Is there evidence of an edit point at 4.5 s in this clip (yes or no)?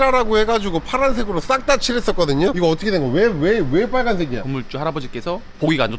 yes